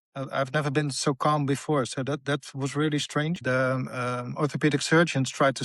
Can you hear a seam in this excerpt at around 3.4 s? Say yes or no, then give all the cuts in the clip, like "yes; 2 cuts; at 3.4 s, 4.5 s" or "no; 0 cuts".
yes; 1 cut; at 3.4 s